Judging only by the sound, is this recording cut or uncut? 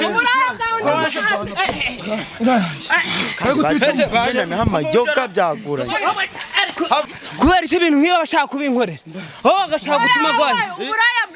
cut